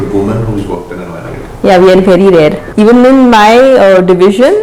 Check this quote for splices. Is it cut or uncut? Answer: cut